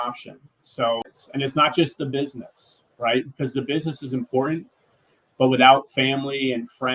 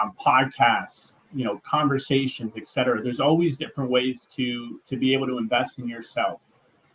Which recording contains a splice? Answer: first; 1 cut; at 1.1 s

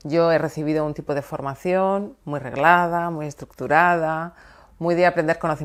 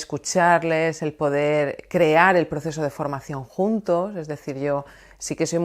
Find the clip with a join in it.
second; 1 cut; at 2.7 s

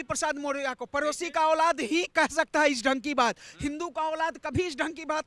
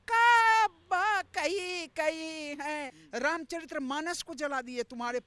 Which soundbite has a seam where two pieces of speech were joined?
second; 1 cut; at 3.0 s

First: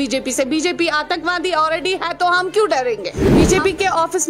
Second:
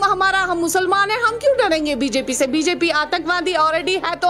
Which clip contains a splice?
first; 1 cut; at 3.4 s

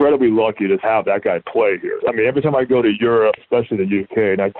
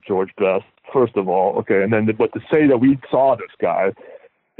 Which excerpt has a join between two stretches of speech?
first; 3 cuts; at 0.8 s, 2.0 s, 3.4 s

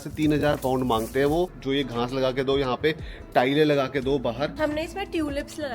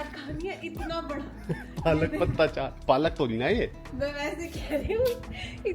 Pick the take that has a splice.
first; 2 cuts; at 1.6 s, 4.5 s

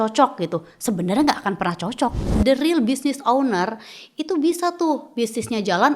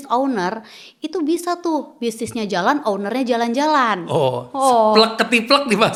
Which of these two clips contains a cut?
first; 1 cut; at 2.2 s

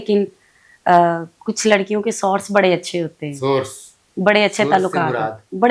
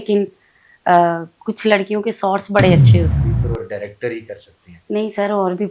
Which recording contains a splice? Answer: second; 1 cut; at 3.2 s

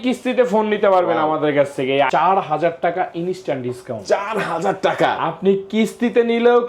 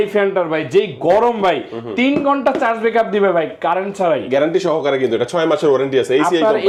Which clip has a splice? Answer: first; 1 cut; at 2.1 s

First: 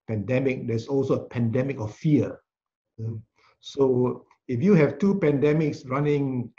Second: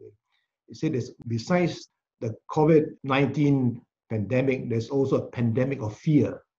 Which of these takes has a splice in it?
second; 3 cuts; at 1.1 s, 1.8 s, 3.0 s

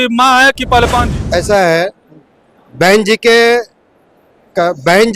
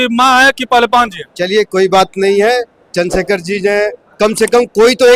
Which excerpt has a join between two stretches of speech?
first; 1 cut; at 1.2 s

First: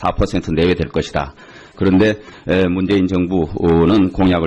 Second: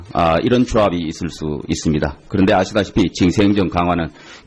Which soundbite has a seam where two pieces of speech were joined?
first; 1 cut; at 2.3 s

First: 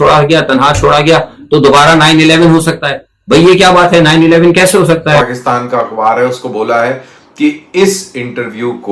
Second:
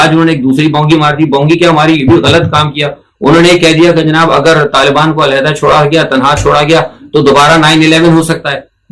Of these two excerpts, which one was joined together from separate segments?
first; 1 cut; at 5.2 s

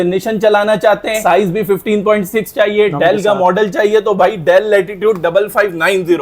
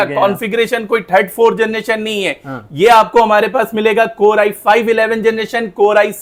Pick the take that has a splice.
first; 1 cut; at 1.2 s

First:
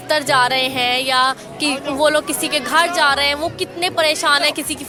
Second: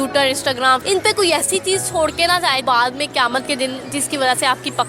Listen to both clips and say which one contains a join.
second; 2 cuts; at 0.8 s, 2.6 s

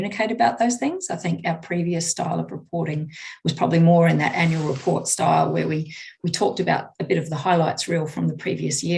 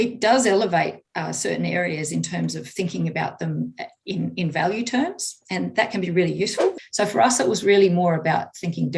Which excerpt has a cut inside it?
second; 1 cut; at 6.8 s

